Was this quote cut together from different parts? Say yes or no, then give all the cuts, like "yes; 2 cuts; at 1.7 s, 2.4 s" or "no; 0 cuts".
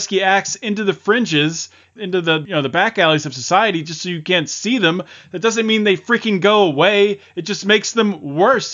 yes; 1 cut; at 2.1 s